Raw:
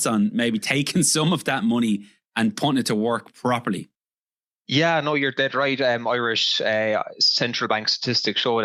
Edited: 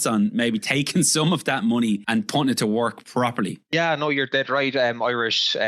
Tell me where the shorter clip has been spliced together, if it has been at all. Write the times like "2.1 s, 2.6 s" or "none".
2.0 s, 3.7 s

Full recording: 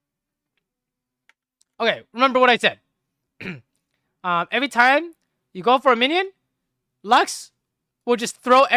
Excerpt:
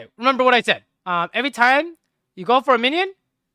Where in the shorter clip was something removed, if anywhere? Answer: 0.9 s

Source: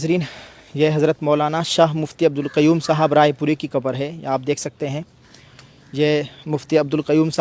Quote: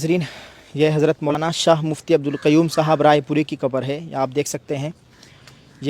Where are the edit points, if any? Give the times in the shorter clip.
1.3 s

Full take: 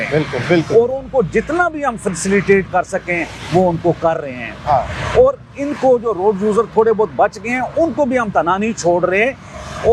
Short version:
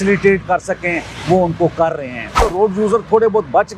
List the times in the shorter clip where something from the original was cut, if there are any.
2.4 s

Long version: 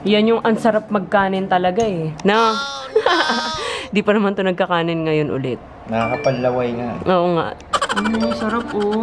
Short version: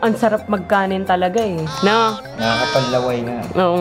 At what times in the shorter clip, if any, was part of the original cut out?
2.2 s

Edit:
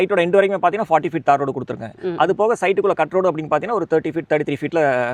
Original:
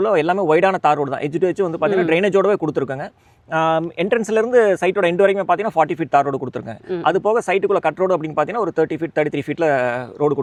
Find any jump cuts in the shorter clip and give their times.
none

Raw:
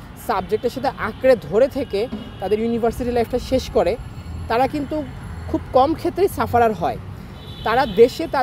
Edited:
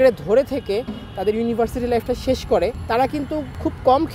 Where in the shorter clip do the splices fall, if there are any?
3.2 s

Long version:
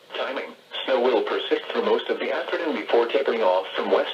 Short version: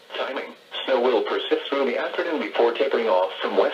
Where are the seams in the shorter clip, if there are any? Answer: 1.7 s

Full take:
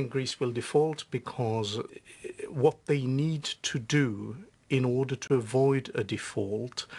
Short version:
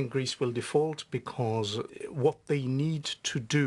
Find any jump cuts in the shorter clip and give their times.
2.0 s

